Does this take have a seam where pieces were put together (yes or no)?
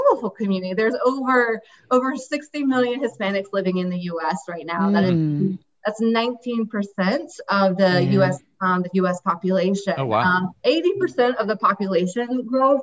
yes